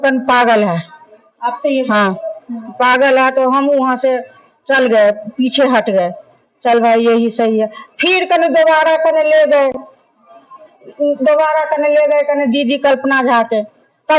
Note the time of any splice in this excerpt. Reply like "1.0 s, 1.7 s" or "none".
none

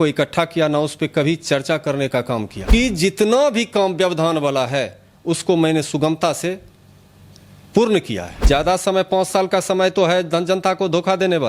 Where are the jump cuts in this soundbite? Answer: 2.7 s, 8.3 s

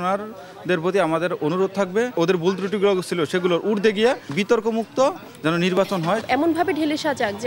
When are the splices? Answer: 6.2 s

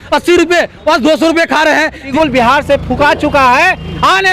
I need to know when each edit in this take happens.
2.1 s

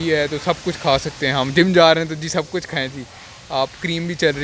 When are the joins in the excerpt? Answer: none

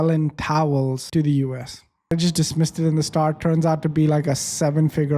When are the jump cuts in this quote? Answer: 1.0 s, 2.1 s

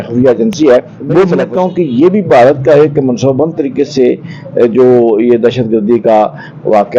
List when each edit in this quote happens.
1.4 s

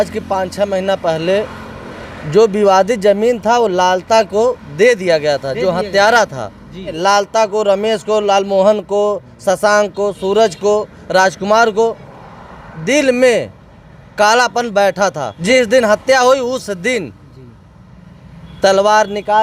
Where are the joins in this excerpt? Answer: 6.9 s, 15.3 s

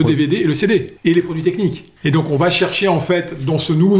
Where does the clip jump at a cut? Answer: 0.9 s, 1.9 s

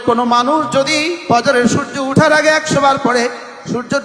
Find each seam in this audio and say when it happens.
1.3 s

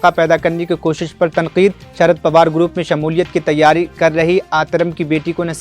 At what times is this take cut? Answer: none

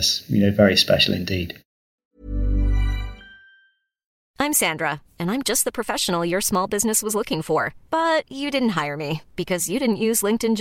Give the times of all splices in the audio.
1.5 s

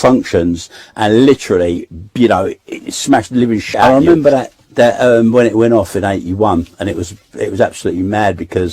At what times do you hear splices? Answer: 3.8 s

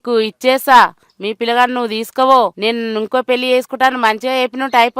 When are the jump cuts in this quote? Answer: 2.6 s

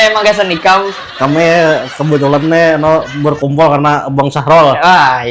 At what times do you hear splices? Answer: none

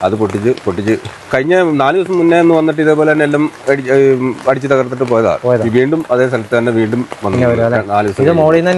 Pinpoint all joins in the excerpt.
1.3 s

